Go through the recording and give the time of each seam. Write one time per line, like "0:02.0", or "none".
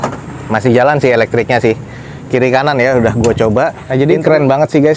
0:03.8